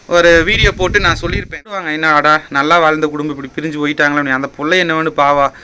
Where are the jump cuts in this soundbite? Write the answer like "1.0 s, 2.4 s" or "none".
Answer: 1.8 s